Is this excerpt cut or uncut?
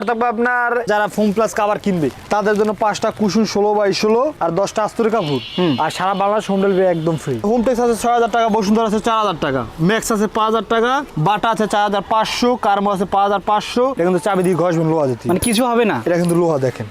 cut